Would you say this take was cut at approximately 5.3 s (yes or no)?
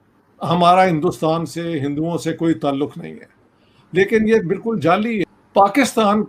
yes